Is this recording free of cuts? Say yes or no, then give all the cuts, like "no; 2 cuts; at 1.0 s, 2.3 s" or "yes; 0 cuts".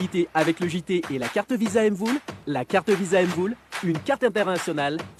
yes; 0 cuts